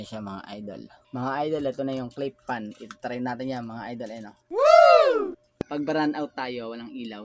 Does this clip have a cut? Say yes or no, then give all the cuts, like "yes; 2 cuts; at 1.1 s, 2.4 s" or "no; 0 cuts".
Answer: yes; 1 cut; at 5.5 s